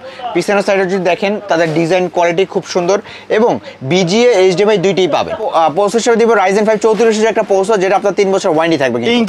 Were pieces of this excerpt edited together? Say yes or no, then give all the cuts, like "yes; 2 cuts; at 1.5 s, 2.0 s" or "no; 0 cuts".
yes; 1 cut; at 5.4 s